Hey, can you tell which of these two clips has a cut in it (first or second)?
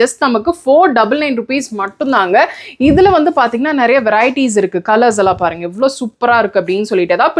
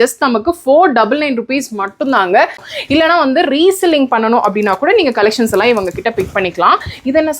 second